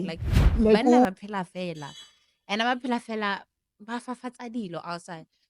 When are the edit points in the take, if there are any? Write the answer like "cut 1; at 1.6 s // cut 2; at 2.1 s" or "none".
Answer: cut 1; at 1.0 s